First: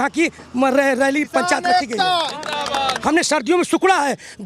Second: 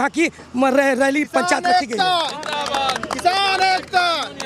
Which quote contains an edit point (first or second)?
first